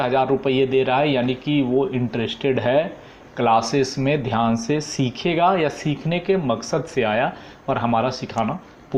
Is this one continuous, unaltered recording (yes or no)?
yes